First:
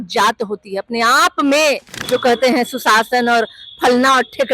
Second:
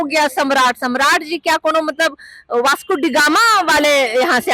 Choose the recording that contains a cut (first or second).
first